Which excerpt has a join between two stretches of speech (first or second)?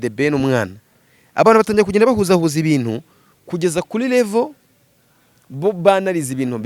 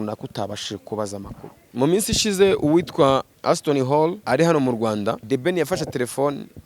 second